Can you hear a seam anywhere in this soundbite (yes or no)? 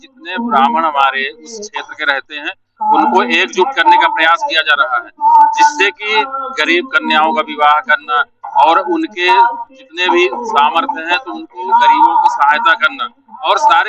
no